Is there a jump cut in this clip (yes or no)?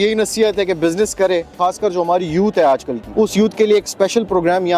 yes